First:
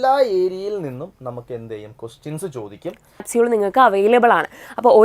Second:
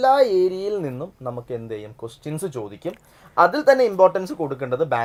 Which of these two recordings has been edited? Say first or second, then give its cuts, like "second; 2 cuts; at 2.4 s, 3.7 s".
first; 1 cut; at 3.3 s